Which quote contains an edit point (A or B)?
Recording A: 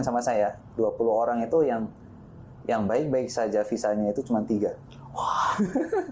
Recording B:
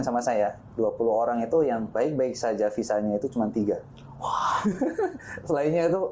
B